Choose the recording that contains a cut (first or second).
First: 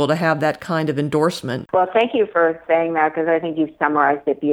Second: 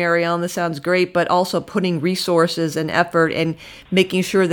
first